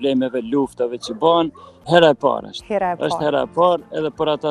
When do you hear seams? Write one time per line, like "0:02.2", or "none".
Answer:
0:01.7

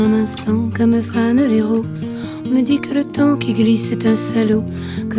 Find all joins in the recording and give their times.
none

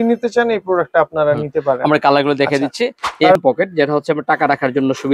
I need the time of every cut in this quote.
0:03.4

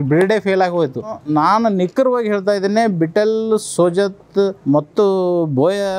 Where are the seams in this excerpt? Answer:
0:01.2
0:04.6

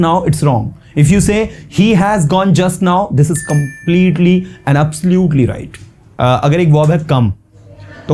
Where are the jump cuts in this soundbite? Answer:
0:06.0

